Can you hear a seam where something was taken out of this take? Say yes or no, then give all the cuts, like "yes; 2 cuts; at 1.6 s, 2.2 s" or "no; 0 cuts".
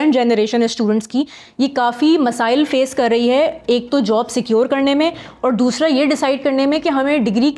no; 0 cuts